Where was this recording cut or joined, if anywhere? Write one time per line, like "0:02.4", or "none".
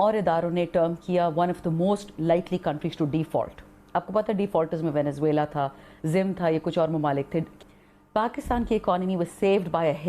0:07.5